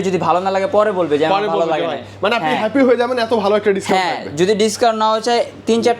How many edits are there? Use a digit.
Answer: 0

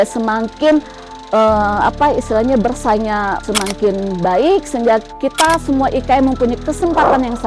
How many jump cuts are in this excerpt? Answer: 1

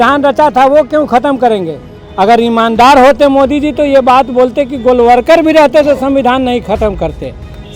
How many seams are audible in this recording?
0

